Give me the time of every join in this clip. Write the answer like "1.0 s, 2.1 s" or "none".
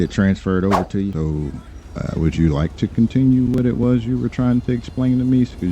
1.2 s